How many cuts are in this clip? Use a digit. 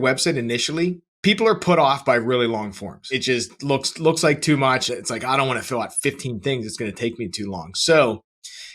3